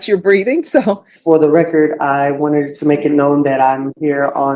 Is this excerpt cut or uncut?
cut